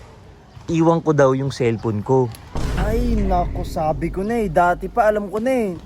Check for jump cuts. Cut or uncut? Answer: cut